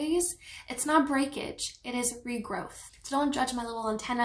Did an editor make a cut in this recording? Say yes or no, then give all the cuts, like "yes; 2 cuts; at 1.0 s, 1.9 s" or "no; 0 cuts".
yes; 1 cut; at 2.9 s